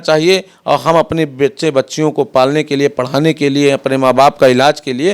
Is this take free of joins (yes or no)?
yes